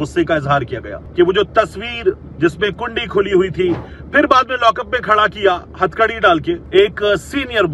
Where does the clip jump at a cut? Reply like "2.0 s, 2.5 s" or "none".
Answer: 1.0 s, 6.6 s